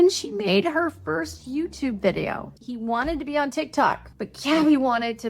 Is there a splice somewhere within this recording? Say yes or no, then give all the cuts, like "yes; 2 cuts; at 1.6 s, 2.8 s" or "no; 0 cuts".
yes; 2 cuts; at 2.6 s, 4.1 s